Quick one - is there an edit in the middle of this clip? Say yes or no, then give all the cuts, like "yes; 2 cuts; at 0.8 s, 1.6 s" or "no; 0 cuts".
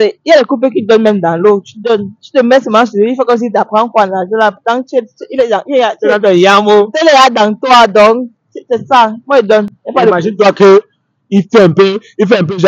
no; 0 cuts